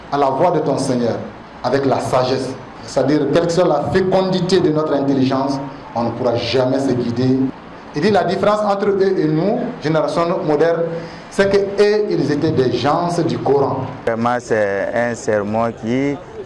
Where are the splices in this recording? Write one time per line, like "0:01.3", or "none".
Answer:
0:02.7
0:07.6
0:14.1